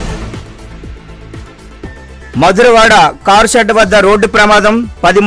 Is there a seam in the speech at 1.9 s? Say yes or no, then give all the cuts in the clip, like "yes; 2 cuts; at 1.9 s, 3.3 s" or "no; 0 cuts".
yes; 1 cut; at 1.9 s